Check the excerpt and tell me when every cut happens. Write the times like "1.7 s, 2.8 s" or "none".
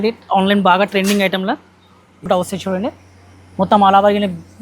2.3 s